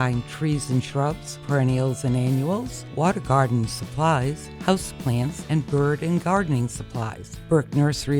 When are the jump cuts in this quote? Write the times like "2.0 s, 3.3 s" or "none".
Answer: none